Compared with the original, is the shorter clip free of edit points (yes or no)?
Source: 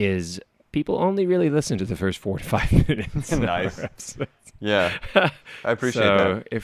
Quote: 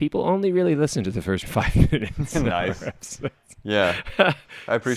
no